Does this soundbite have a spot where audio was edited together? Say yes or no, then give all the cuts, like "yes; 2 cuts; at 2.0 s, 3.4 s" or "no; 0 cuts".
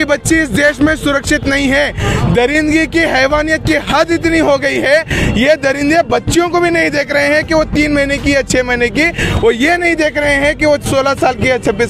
no; 0 cuts